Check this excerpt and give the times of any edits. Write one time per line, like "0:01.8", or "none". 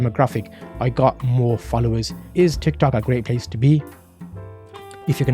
0:02.3